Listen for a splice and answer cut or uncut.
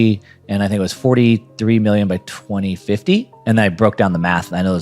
cut